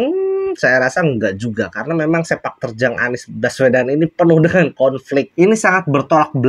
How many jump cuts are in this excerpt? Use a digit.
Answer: 1